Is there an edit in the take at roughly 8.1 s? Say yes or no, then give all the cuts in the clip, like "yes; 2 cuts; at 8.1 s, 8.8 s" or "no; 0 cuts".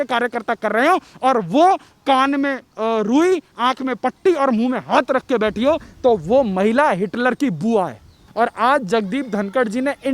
yes; 1 cut; at 8.1 s